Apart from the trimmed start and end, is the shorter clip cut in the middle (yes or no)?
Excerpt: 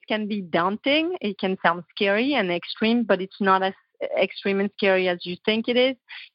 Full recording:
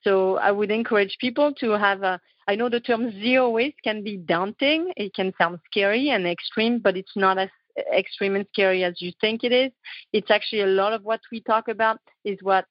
no